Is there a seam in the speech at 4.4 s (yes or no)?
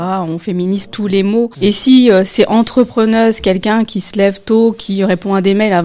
no